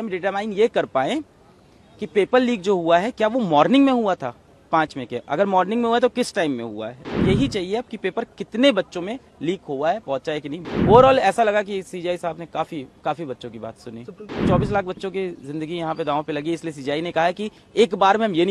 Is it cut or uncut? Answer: cut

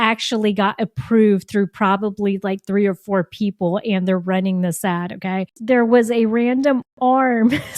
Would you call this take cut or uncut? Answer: cut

